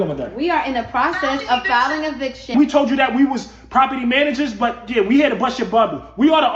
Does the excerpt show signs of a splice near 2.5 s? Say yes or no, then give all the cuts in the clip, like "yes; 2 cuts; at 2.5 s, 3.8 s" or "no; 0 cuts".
yes; 1 cut; at 2.5 s